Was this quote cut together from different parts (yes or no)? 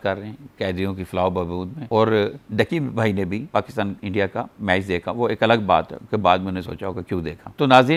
no